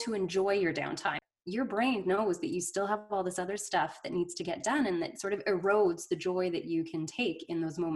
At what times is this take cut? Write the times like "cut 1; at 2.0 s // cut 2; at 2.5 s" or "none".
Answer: cut 1; at 1.2 s